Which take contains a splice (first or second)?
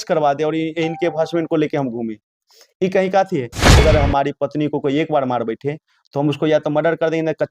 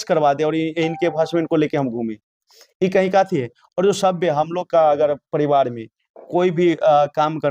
first